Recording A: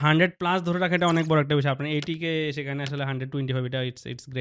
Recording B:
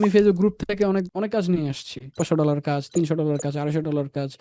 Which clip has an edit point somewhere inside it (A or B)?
B